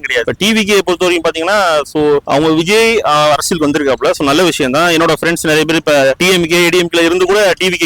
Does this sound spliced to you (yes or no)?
no